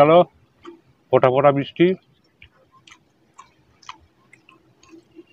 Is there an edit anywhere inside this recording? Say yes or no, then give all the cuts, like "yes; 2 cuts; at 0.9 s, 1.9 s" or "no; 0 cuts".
no; 0 cuts